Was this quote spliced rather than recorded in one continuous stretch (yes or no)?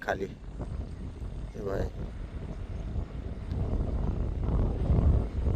no